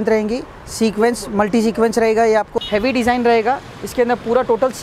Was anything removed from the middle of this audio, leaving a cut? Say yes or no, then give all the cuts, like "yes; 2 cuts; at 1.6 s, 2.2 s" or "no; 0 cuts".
yes; 1 cut; at 2.6 s